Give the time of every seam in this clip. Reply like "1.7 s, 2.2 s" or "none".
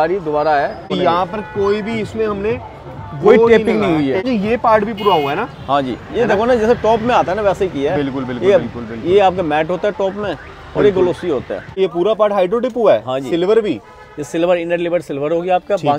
0.9 s, 4.2 s, 11.8 s